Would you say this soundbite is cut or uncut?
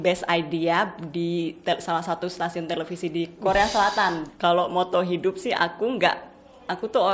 cut